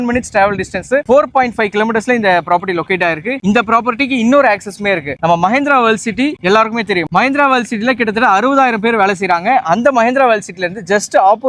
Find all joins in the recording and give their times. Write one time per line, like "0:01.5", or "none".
none